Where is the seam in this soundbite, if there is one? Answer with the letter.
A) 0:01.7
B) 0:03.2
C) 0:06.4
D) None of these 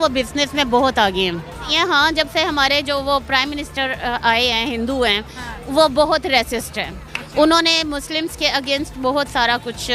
A